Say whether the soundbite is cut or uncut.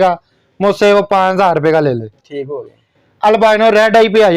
uncut